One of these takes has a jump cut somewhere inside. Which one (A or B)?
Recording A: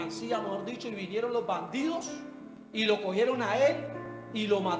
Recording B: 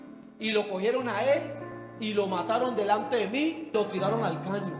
B